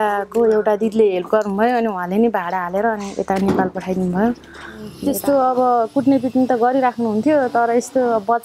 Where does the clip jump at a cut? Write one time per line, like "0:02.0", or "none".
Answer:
0:05.0